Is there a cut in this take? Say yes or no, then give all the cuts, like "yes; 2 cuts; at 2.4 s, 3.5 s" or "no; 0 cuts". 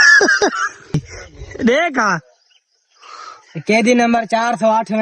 yes; 1 cut; at 1.1 s